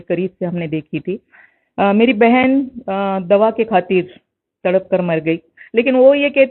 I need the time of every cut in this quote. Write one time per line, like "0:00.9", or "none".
0:05.5